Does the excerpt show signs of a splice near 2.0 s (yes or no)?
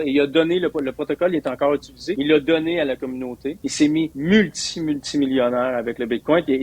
yes